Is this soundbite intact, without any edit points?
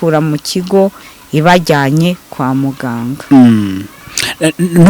yes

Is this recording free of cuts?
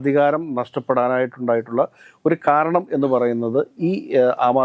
yes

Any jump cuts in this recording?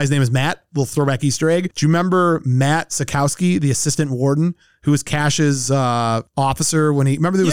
no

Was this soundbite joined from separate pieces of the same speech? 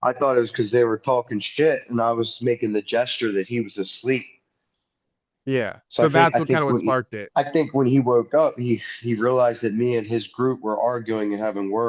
no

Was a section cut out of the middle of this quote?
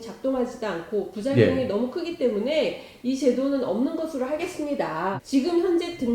yes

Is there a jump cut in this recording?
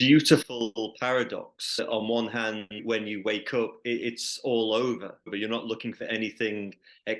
yes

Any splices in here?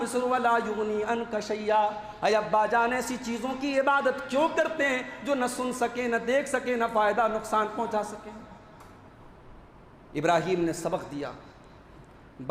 no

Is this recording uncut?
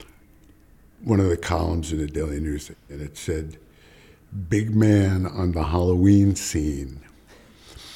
no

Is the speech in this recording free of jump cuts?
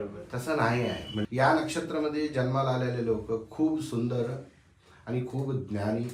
no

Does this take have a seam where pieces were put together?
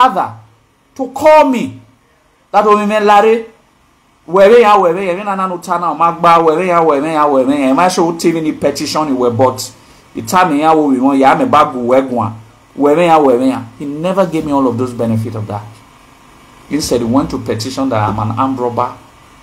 no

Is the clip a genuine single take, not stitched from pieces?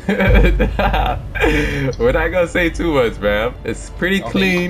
no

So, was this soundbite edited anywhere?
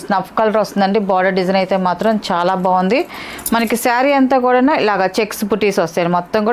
no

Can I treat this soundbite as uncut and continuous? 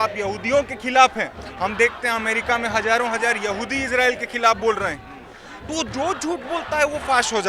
yes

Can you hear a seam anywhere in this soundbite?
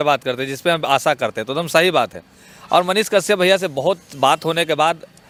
no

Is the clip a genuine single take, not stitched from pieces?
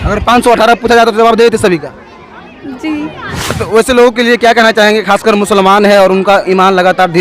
no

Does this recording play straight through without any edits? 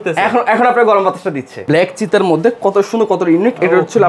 no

